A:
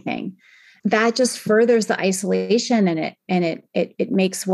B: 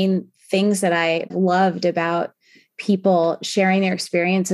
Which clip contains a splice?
B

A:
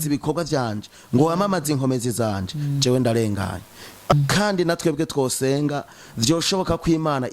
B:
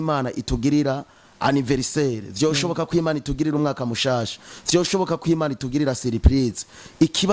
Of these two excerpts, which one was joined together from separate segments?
A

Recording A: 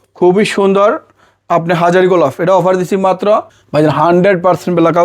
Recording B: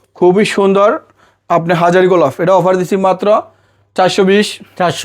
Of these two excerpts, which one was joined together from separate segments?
A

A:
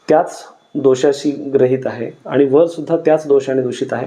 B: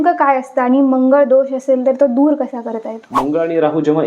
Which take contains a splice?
B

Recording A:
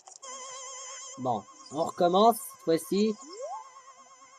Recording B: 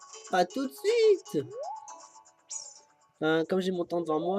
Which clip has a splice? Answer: B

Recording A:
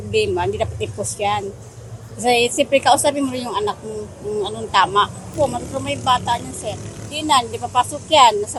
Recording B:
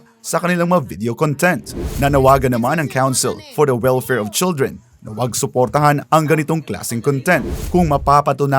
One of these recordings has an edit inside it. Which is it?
B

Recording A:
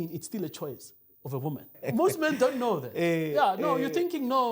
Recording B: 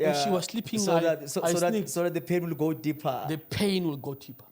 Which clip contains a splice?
A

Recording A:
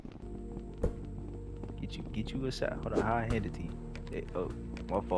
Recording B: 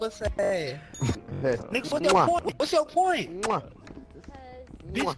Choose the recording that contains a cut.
B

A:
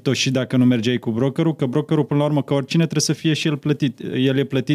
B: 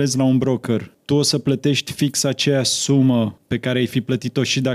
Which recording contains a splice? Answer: B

